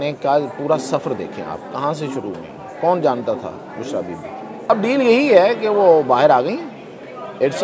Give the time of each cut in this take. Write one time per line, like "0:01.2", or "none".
0:04.7